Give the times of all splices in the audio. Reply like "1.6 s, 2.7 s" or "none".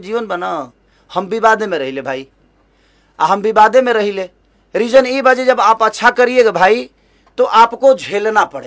none